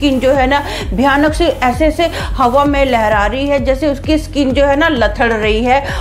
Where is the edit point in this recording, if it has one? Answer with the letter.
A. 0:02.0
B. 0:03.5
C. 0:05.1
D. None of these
D